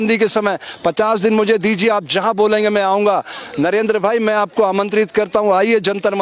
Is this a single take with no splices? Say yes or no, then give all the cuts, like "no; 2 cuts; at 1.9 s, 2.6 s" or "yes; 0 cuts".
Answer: yes; 0 cuts